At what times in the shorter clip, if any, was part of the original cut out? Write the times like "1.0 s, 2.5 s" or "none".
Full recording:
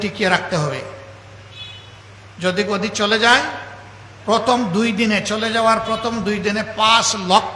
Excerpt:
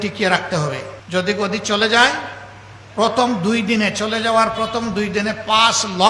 0.9 s